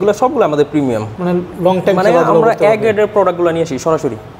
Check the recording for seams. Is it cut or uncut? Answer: uncut